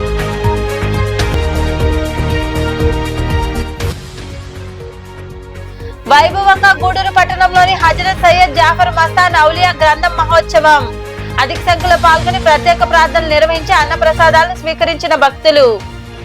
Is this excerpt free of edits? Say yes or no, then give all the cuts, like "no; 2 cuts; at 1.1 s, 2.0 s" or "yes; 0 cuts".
no; 1 cut; at 1.3 s